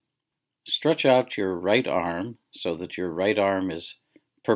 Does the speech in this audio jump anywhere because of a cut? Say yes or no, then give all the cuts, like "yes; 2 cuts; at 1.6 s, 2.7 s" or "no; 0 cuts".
yes; 1 cut; at 2.4 s